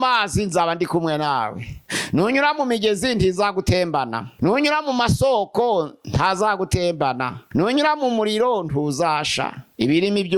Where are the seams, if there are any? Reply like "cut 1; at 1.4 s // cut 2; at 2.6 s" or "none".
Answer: none

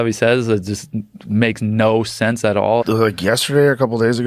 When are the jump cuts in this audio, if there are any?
cut 1; at 2.8 s

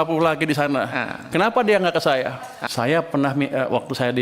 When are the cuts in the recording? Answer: cut 1; at 2.5 s

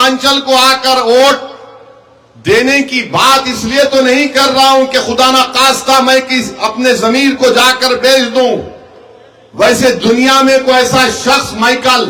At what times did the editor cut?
none

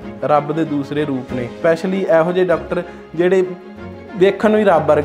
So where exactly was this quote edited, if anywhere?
none

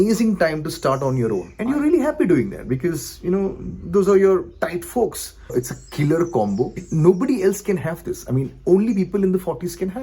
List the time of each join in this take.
cut 1; at 1.5 s // cut 2; at 5.5 s // cut 3; at 6.8 s

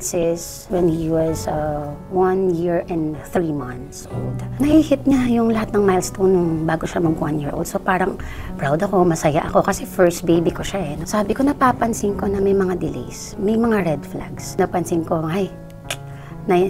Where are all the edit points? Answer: cut 1; at 10.9 s // cut 2; at 14.6 s

